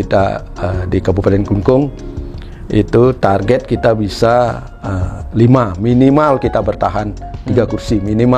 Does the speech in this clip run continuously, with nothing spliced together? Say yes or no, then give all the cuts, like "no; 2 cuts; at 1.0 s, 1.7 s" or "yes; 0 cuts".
yes; 0 cuts